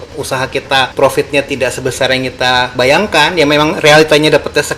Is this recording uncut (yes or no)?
no